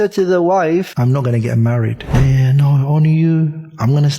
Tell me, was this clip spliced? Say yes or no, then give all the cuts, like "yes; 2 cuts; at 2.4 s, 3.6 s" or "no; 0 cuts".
yes; 2 cuts; at 0.9 s, 2.0 s